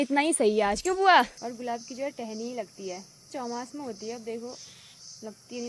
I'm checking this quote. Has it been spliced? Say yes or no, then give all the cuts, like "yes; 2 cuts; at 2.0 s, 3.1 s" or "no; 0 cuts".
yes; 2 cuts; at 1.4 s, 3.3 s